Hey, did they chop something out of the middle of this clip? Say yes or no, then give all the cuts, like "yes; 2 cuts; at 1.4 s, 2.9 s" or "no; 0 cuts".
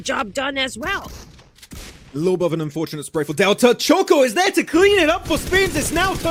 no; 0 cuts